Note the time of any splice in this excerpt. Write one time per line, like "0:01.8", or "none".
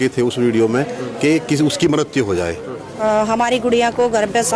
0:02.9